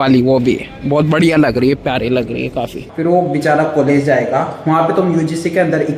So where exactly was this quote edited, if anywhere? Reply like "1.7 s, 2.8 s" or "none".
2.8 s